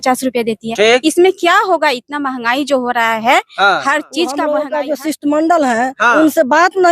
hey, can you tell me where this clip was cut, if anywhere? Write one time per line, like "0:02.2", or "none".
0:04.6